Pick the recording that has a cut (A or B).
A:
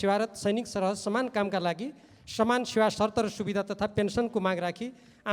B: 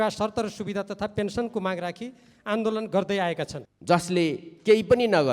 B